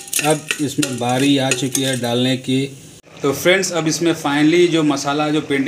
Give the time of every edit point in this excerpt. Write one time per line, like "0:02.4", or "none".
0:03.0

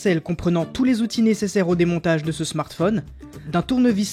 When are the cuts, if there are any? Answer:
none

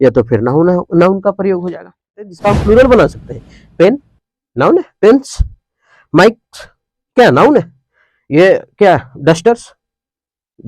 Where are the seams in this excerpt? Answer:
0:02.2

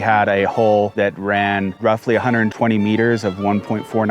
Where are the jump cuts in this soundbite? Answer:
0:00.9

